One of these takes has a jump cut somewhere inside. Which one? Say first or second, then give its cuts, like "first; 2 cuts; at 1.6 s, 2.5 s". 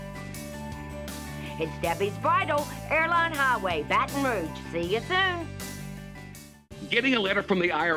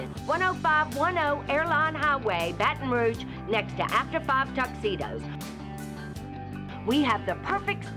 first; 1 cut; at 6.6 s